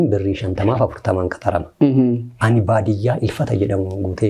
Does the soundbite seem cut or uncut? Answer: uncut